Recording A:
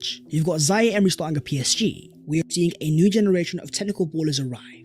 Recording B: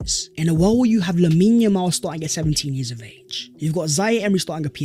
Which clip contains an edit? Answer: A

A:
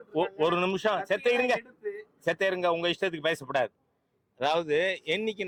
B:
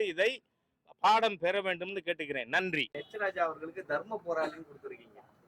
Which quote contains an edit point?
B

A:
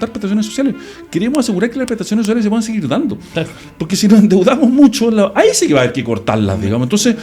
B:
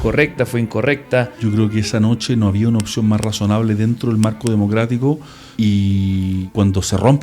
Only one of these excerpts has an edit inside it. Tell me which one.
B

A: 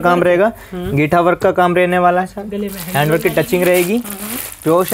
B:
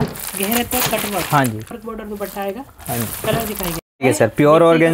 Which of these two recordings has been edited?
B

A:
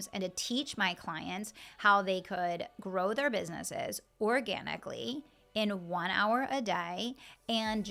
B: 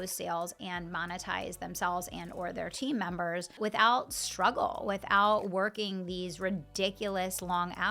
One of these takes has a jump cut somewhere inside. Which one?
B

